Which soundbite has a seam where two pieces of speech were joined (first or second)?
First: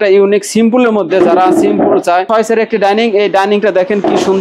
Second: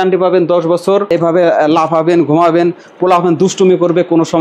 first